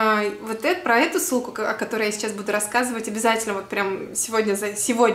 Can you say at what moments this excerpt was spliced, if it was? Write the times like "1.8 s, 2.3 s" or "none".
none